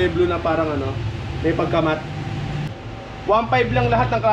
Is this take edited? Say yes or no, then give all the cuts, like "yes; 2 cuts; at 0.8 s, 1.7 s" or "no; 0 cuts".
yes; 1 cut; at 2.6 s